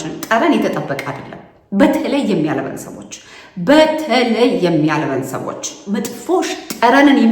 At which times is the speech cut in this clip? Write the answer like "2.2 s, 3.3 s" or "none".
5.8 s